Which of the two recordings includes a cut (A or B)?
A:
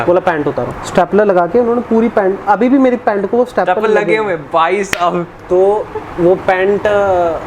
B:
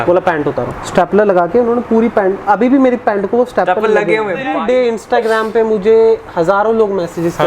B